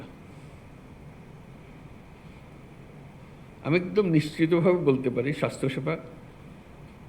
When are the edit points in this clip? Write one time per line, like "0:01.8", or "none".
0:02.5